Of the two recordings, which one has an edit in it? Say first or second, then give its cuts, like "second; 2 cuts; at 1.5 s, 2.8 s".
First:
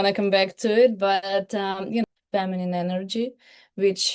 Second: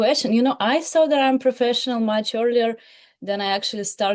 first; 1 cut; at 2.1 s